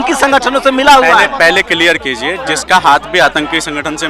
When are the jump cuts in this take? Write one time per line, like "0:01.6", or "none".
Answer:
0:02.5